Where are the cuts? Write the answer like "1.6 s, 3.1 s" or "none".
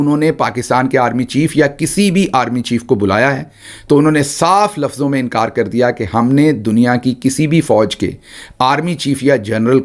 none